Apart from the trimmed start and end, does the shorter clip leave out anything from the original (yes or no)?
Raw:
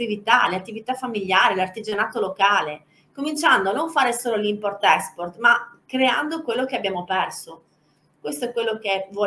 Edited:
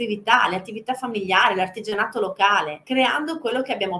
yes